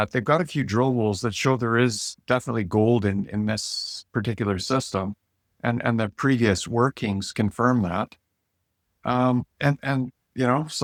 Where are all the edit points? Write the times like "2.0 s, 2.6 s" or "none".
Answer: none